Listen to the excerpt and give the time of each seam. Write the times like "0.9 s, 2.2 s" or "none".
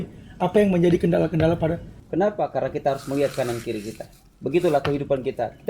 1.9 s